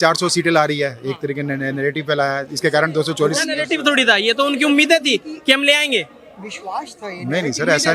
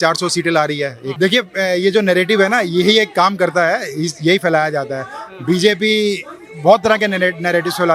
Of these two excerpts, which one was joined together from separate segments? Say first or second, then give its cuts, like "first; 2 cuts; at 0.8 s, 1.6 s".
second; 1 cut; at 1.2 s